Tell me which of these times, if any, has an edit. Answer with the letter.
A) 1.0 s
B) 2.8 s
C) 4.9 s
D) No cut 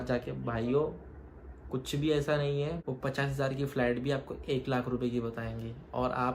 B